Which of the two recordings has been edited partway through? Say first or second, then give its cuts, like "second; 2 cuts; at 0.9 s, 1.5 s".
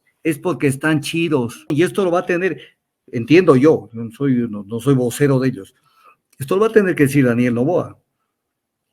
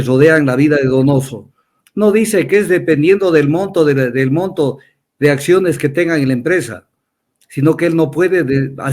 first; 1 cut; at 1.7 s